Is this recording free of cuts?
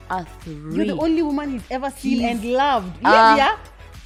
yes; 0 cuts

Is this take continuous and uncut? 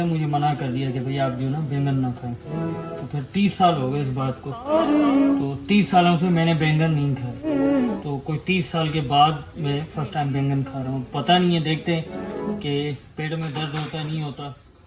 yes; 0 cuts

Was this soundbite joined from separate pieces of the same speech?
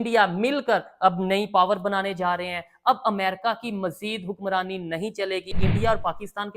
yes; 1 cut; at 5.6 s

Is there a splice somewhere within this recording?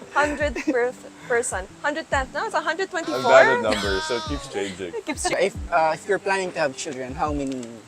yes; 1 cut; at 5.3 s

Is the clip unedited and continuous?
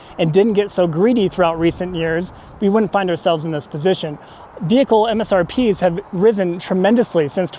yes; 0 cuts

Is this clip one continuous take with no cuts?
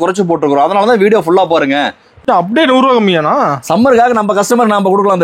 no; 1 cut; at 2.2 s

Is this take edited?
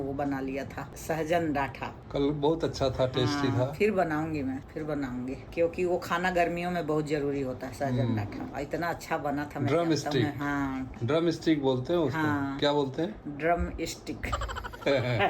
no; 0 cuts

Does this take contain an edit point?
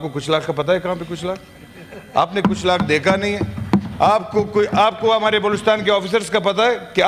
no; 0 cuts

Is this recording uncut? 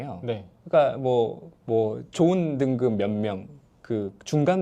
no; 1 cut; at 1.5 s

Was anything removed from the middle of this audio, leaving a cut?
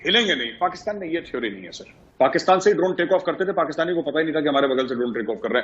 yes; 1 cut; at 2.0 s

